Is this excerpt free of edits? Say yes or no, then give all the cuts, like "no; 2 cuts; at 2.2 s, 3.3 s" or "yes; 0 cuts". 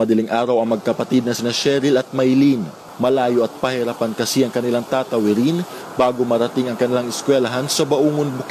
yes; 0 cuts